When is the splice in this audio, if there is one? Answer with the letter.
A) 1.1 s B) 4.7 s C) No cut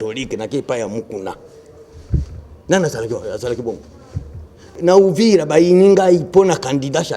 B